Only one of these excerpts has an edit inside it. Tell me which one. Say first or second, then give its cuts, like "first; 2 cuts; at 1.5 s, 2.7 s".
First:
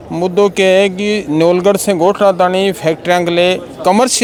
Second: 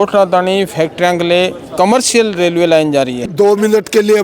second; 1 cut; at 3.2 s